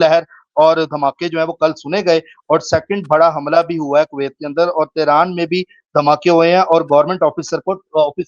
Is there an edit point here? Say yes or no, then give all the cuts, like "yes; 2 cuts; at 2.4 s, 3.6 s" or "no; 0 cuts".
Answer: no; 0 cuts